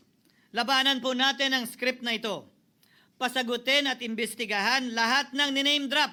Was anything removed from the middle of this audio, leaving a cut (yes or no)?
no